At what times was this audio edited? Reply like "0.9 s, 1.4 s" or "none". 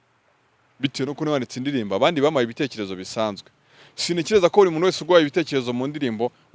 none